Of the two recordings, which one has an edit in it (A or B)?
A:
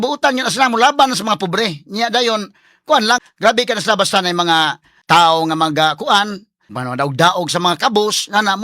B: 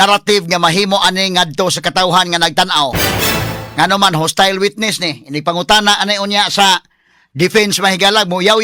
A